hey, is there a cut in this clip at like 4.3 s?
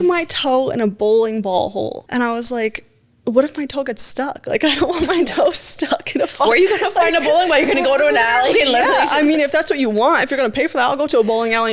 no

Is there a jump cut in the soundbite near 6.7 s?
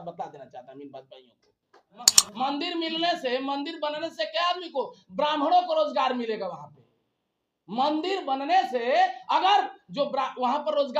no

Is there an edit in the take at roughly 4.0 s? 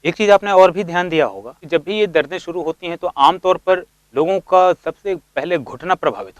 yes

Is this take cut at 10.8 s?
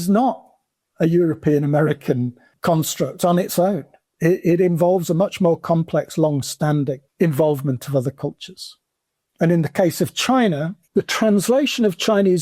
yes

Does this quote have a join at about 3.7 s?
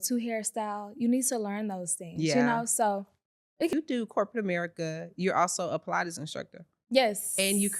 yes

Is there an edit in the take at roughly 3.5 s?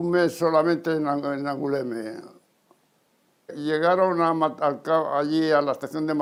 no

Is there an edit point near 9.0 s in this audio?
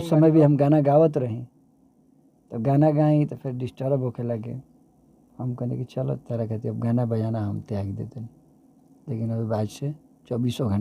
no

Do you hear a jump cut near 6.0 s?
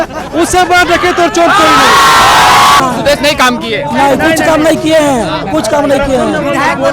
no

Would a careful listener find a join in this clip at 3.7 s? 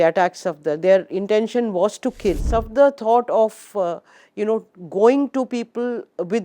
no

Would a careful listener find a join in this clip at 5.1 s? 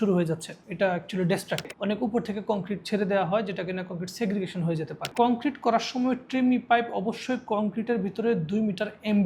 yes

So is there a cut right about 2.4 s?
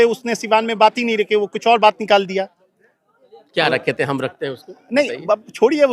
no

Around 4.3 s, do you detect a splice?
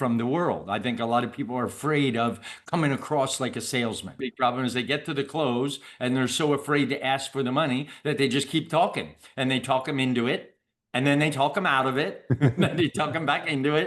yes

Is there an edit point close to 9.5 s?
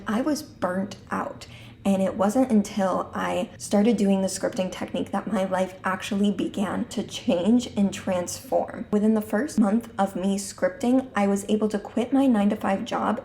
yes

